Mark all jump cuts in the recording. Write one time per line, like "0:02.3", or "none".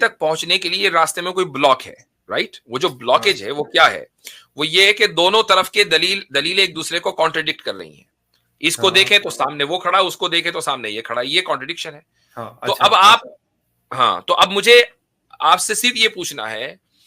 none

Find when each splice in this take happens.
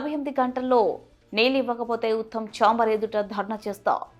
none

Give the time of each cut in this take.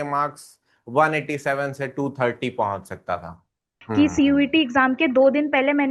0:03.7

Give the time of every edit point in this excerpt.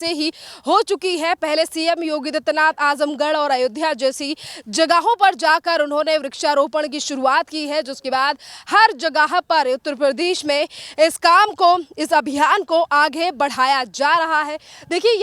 none

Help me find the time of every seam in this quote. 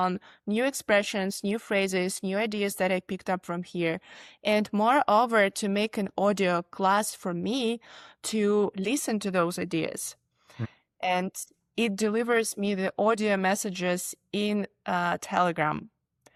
none

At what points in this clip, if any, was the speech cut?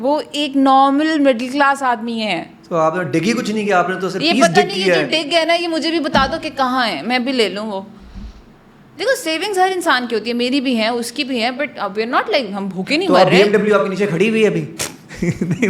none

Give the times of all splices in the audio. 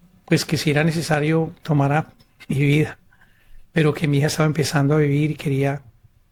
none

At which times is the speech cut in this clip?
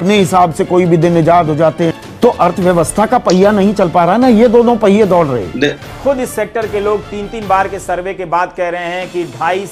0:02.0
0:05.8

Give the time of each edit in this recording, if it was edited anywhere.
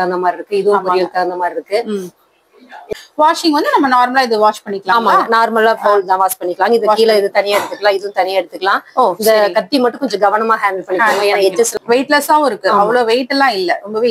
0:02.9
0:11.7

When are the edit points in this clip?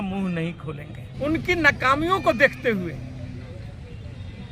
0:01.0

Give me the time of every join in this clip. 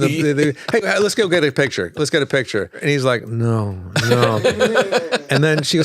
0:02.8

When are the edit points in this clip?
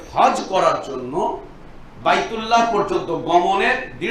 none

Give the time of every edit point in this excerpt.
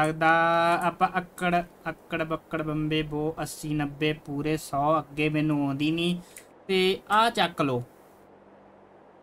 none

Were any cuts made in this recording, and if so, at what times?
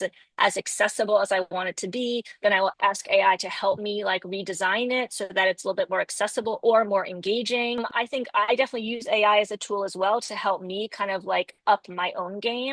0:07.9

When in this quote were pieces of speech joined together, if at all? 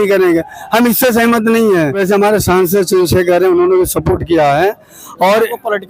0:02.0

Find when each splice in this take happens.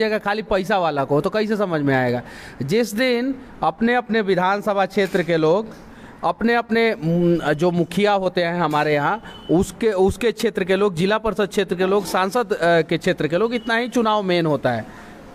none

